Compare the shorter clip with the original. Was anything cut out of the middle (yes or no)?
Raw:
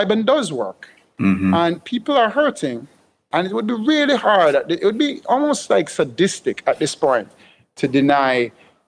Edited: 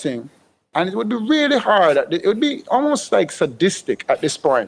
no